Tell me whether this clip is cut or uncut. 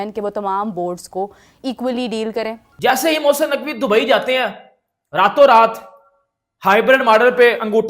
cut